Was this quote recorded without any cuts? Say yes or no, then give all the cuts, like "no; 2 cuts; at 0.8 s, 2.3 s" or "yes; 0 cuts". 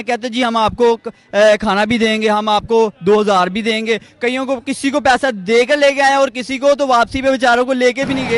yes; 0 cuts